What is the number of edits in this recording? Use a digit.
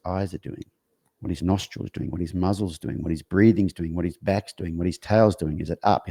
0